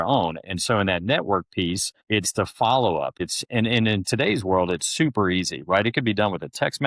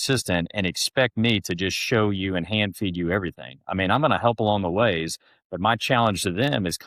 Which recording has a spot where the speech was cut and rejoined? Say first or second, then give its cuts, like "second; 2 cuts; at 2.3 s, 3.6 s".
first; 2 cuts; at 1.9 s, 3.2 s